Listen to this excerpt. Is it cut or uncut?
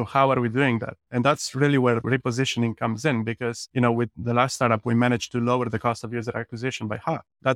cut